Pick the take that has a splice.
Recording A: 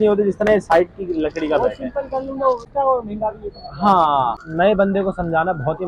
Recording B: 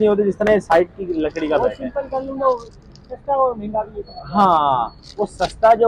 A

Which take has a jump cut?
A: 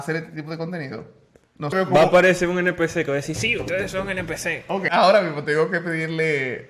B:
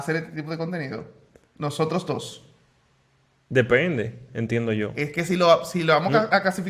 A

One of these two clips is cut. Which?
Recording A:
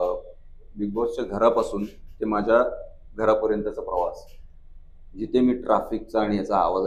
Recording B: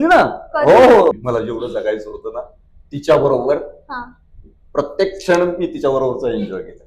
B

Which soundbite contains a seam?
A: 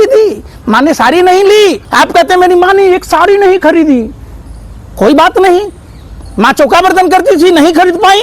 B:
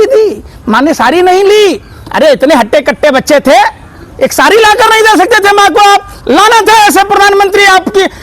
A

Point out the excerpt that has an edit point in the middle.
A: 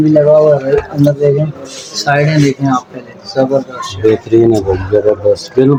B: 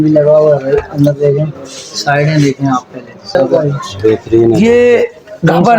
B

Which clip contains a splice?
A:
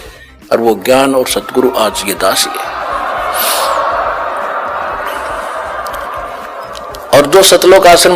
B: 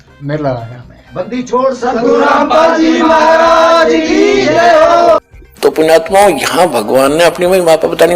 B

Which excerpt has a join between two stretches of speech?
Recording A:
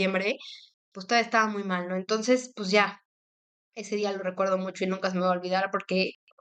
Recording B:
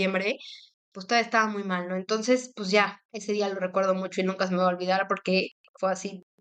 B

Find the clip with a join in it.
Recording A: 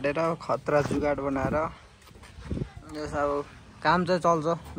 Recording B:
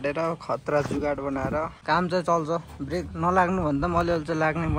B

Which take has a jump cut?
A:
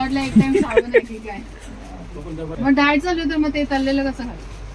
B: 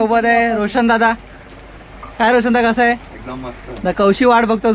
A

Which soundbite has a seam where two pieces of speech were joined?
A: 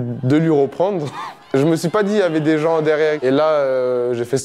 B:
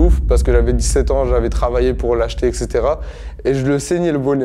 A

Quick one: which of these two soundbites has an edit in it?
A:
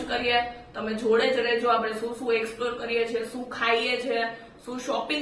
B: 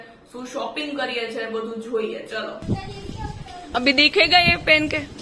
B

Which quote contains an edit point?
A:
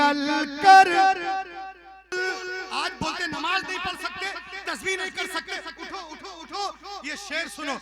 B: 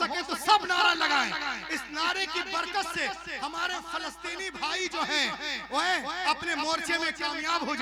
A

